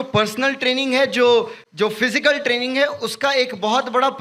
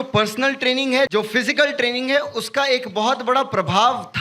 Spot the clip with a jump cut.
second; 1 cut; at 1.1 s

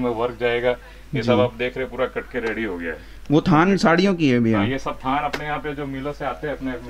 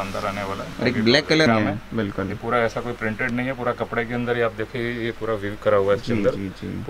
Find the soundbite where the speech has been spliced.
second; 1 cut; at 1.5 s

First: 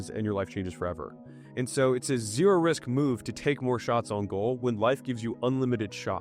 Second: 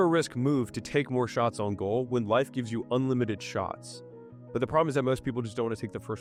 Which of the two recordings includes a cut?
first; 1 cut; at 1.0 s

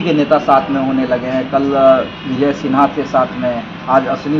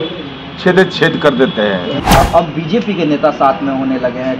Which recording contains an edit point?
second; 1 cut; at 2.0 s

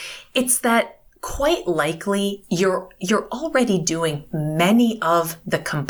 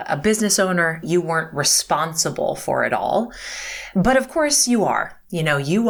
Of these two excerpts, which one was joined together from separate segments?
second; 1 cut; at 1.0 s

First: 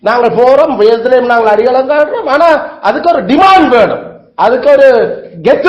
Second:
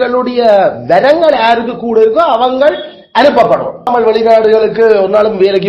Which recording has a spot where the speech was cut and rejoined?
second; 1 cut; at 3.9 s

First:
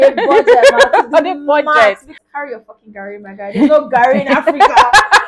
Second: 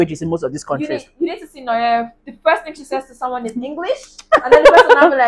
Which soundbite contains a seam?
first; 1 cut; at 2.1 s

